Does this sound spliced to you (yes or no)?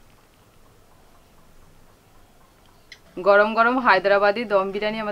no